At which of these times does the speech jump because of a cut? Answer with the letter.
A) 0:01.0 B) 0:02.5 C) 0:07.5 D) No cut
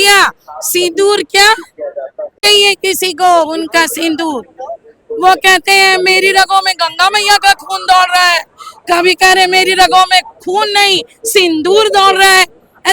B